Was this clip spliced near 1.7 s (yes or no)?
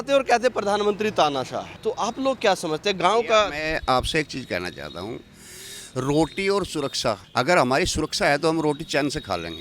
yes